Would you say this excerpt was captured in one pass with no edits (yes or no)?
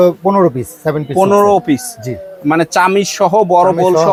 yes